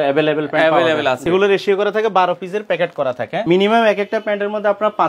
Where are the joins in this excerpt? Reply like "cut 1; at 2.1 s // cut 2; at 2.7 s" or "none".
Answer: cut 1; at 1.2 s // cut 2; at 3.4 s